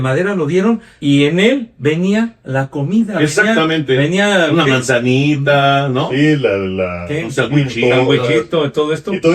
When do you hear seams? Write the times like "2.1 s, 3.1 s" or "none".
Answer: 0.9 s, 2.4 s